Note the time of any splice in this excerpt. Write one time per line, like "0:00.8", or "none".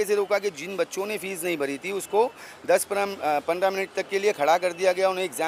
none